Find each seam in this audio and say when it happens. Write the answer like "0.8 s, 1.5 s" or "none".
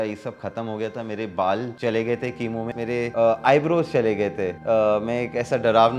1.7 s, 2.8 s, 4.5 s